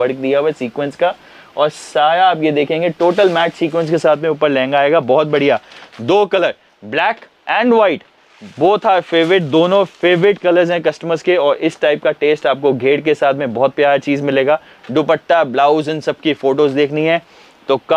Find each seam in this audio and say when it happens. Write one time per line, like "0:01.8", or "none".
none